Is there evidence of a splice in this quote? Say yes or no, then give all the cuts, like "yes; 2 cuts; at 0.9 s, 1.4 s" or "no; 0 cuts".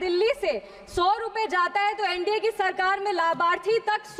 no; 0 cuts